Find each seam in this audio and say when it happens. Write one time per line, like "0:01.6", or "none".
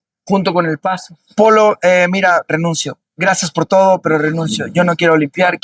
0:01.1